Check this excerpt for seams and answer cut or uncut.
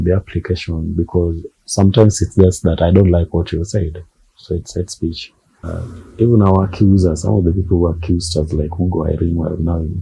cut